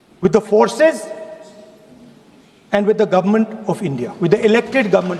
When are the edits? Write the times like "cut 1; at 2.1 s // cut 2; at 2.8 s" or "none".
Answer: none